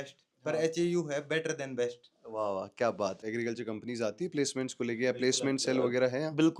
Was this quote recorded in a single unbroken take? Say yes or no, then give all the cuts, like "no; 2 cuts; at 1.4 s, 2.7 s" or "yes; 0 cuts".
no; 1 cut; at 3.3 s